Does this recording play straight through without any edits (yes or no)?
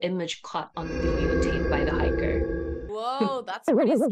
no